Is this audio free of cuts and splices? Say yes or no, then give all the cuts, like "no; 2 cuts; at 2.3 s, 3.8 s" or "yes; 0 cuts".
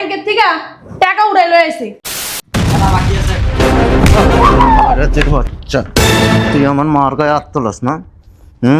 no; 1 cut; at 2.4 s